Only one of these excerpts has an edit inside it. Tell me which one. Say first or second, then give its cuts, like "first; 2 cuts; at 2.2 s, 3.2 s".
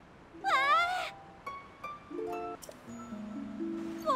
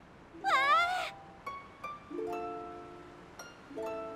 first; 1 cut; at 2.6 s